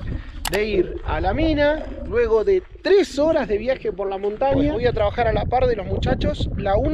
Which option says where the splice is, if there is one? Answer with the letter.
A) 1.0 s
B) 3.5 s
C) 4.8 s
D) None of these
C